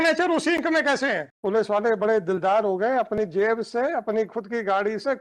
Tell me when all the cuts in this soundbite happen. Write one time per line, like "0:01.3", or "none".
0:01.3